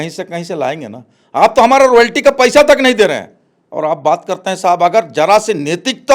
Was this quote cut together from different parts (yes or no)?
no